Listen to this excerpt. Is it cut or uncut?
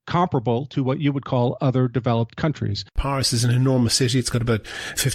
cut